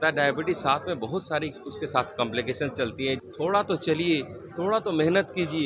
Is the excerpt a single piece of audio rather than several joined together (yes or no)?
no